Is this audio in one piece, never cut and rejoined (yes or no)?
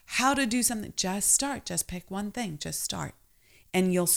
yes